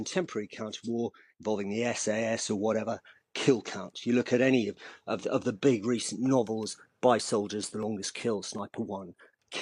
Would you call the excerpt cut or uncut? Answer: uncut